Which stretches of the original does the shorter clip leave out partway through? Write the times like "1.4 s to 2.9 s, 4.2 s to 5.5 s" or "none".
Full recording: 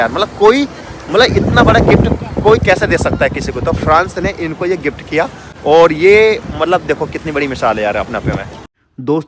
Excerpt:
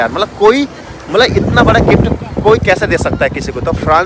none